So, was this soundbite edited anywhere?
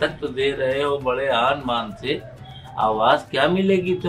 no; 0 cuts

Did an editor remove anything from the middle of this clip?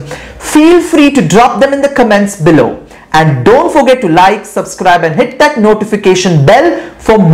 no; 0 cuts

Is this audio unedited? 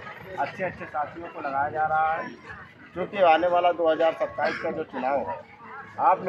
yes; 0 cuts

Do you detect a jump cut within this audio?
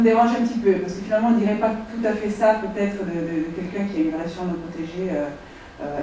yes; 1 cut; at 3.9 s

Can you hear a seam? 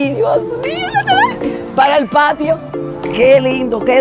no; 0 cuts

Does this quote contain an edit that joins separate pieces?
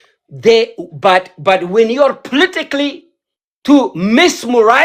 no; 0 cuts

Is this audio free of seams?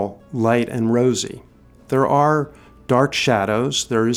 yes; 0 cuts

